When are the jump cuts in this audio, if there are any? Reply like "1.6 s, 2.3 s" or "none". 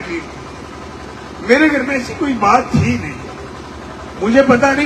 none